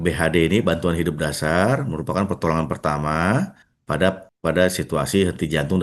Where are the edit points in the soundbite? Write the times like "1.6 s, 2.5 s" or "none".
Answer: 4.0 s